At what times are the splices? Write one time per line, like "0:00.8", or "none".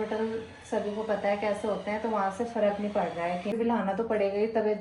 0:03.5